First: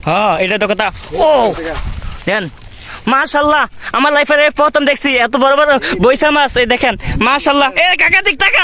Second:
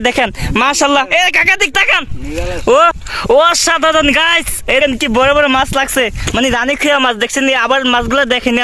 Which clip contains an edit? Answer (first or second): second